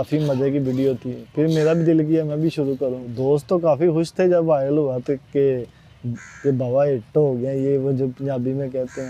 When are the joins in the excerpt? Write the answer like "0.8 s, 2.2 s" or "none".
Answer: 3.1 s

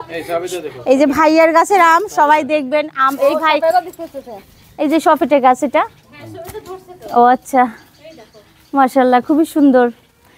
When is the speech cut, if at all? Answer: none

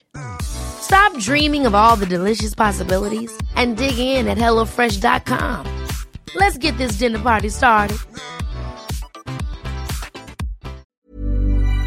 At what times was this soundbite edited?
10.9 s

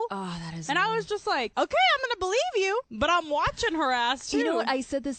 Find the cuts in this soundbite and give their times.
1.5 s, 2.9 s

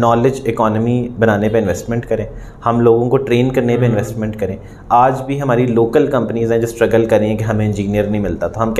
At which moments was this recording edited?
none

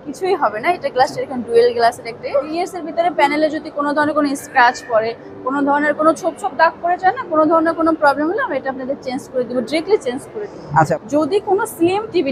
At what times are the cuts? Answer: 2.5 s, 10.9 s

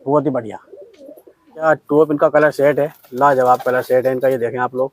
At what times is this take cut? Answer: 1.6 s

